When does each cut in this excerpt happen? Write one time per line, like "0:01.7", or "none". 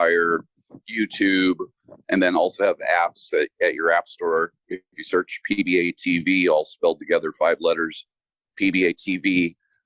none